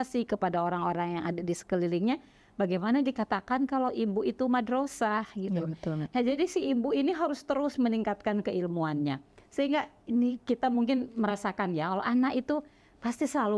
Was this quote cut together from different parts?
no; 0 cuts

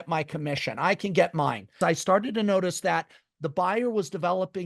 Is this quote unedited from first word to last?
no; 1 cut; at 1.7 s

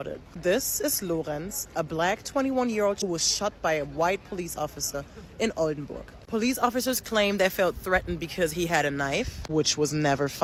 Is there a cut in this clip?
no; 0 cuts

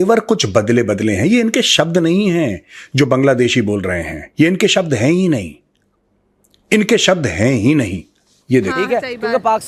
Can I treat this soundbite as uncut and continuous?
no; 1 cut; at 8.7 s

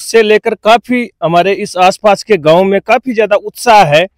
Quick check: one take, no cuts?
yes; 0 cuts

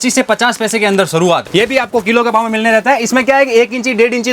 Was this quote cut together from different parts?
yes; 1 cut; at 1.5 s

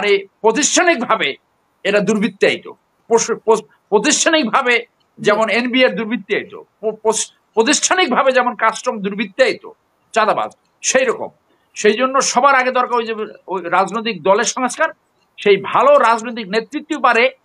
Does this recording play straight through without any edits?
yes; 0 cuts

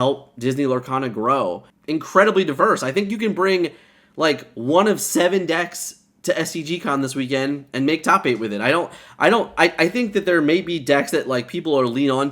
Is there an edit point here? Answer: yes; 1 cut; at 1.7 s

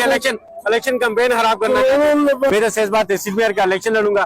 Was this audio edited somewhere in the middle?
yes; 1 cut; at 2.5 s

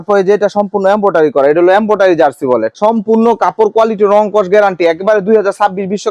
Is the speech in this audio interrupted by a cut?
no; 0 cuts

